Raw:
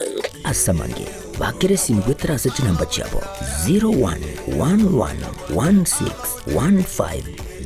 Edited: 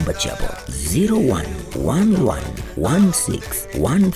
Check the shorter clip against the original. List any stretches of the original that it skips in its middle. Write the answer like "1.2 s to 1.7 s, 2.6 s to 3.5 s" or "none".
none